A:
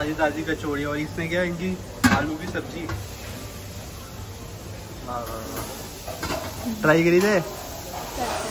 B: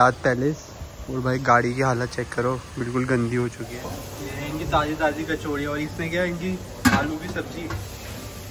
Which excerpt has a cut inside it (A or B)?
B